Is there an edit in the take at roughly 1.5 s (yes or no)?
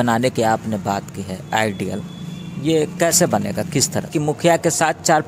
no